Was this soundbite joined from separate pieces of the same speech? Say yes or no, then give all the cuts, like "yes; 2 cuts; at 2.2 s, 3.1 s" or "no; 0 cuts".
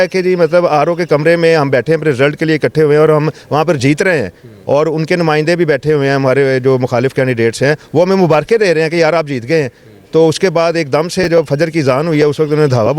no; 0 cuts